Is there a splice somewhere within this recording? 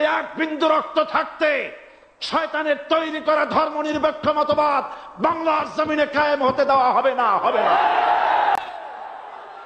no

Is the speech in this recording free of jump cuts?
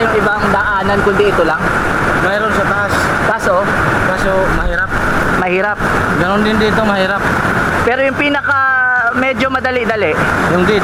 yes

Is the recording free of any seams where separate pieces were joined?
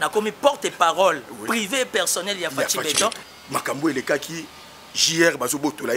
no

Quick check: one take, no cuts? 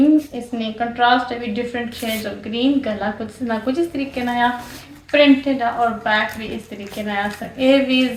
yes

